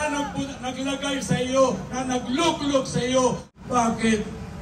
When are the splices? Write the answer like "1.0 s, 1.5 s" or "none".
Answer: 3.5 s